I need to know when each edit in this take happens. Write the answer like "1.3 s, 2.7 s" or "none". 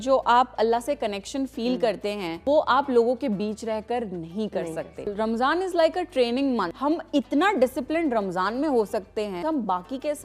2.4 s, 5.1 s, 6.7 s, 9.4 s